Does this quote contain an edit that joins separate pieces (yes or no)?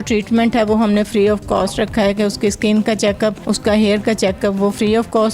yes